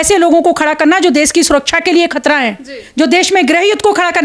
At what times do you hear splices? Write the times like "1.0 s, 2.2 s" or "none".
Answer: none